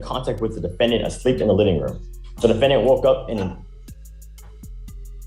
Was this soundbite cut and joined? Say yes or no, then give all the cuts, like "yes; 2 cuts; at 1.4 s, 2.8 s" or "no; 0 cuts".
no; 0 cuts